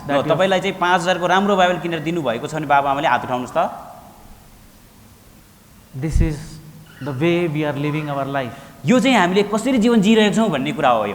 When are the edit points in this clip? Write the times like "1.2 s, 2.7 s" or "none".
5.4 s